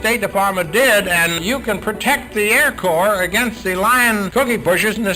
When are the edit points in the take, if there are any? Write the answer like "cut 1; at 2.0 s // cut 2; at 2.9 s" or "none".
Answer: cut 1; at 1.4 s // cut 2; at 4.3 s